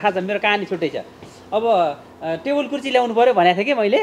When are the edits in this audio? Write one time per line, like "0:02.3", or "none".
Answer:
none